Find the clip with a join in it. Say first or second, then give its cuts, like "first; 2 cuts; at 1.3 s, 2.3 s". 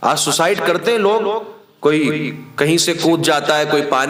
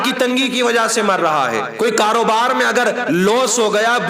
second; 1 cut; at 1.7 s